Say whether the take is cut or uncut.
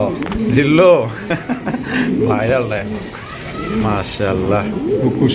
uncut